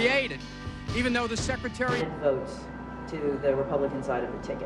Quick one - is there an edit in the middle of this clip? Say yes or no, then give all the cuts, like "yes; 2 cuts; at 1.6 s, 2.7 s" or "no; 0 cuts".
no; 0 cuts